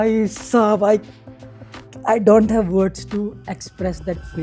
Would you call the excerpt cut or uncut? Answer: uncut